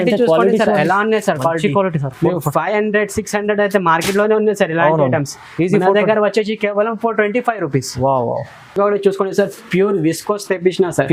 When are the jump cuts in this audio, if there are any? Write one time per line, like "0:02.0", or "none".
none